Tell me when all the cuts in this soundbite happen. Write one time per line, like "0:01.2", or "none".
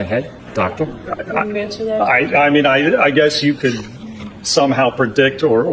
none